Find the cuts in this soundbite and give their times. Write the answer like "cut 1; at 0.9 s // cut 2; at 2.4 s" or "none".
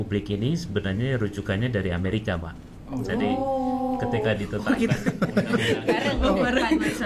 none

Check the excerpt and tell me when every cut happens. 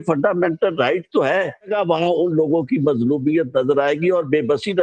cut 1; at 1.7 s

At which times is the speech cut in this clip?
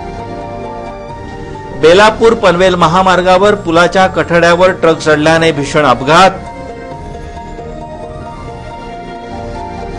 none

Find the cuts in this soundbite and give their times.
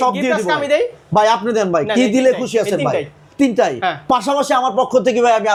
none

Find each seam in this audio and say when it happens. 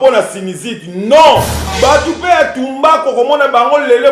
cut 1; at 1.6 s

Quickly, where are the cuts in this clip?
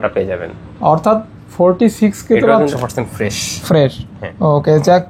cut 1; at 2.7 s

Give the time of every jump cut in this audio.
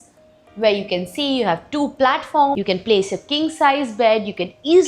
cut 1; at 2.6 s

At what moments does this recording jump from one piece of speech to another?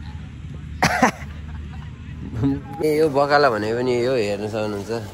cut 1; at 2.8 s

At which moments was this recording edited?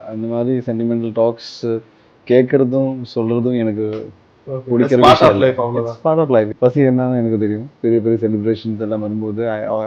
cut 1; at 6.5 s // cut 2; at 7.7 s

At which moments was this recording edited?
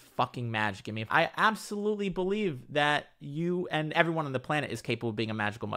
cut 1; at 1.1 s // cut 2; at 3.9 s

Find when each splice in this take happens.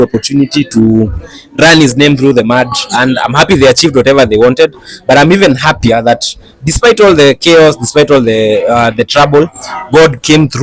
none

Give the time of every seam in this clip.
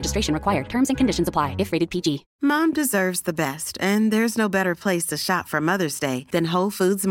cut 1; at 2.3 s

